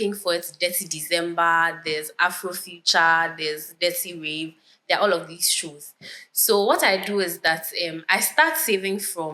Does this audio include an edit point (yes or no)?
no